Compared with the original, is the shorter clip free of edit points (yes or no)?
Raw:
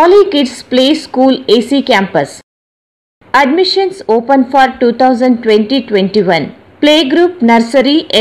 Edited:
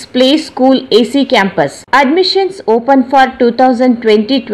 no